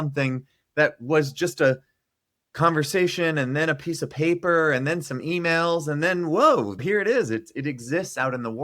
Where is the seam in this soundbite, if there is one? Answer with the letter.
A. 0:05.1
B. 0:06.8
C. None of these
B